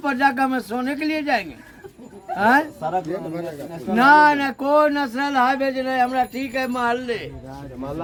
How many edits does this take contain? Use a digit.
0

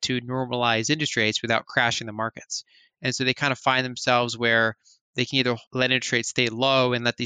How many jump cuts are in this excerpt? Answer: 1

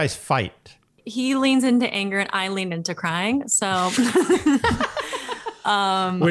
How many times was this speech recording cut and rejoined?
1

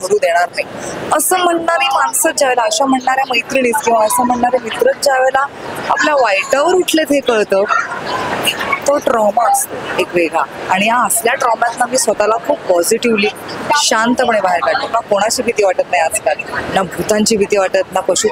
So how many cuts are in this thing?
1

